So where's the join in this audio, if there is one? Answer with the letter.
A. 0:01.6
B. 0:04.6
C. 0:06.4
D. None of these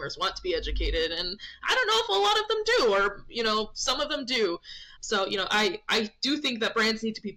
D